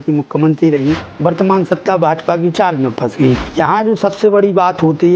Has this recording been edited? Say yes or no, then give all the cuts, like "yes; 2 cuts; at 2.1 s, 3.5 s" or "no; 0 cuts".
yes; 2 cuts; at 1.1 s, 3.5 s